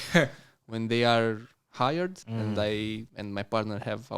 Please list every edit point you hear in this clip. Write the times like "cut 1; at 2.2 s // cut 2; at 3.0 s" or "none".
cut 1; at 2.2 s // cut 2; at 3.1 s